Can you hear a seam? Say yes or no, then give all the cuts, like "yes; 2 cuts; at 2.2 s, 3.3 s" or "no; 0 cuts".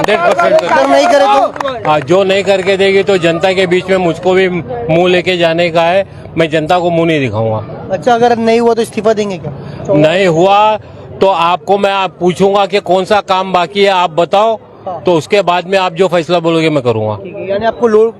no; 0 cuts